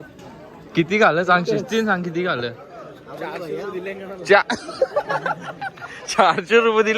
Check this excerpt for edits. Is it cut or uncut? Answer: uncut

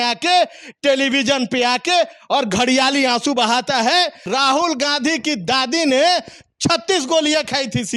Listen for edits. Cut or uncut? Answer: cut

